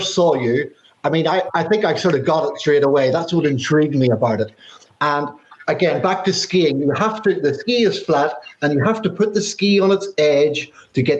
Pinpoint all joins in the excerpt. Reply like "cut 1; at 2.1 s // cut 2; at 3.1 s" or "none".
cut 1; at 1.5 s // cut 2; at 5.5 s